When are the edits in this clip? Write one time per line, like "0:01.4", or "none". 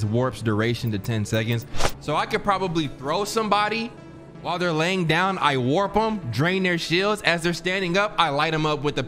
none

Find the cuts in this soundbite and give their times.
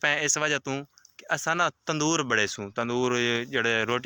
none

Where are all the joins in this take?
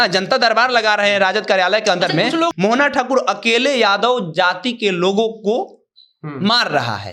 0:02.5

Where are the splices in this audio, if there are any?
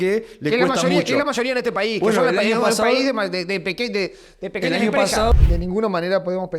0:05.4

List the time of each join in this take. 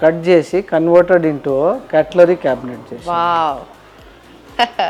none

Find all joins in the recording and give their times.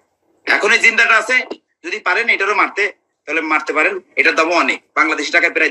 none

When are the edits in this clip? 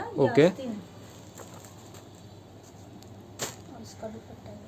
none

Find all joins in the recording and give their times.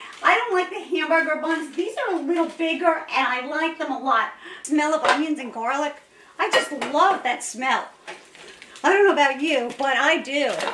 0:04.6

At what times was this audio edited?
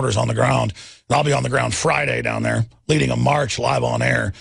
0:01.0

